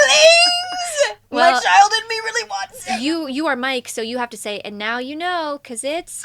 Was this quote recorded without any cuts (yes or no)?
no